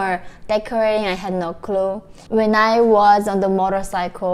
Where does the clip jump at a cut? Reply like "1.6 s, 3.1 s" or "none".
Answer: 2.1 s